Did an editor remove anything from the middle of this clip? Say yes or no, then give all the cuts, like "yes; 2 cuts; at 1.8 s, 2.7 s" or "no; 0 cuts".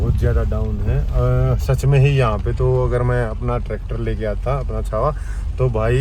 no; 0 cuts